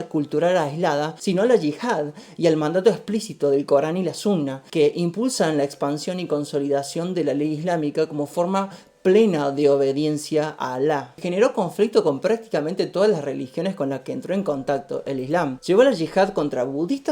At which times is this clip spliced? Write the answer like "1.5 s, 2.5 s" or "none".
1.1 s, 4.6 s, 11.1 s, 15.6 s